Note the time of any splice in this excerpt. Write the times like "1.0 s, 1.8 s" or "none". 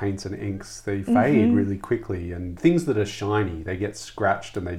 2.5 s